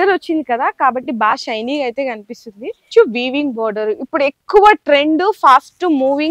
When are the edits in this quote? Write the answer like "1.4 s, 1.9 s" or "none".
2.9 s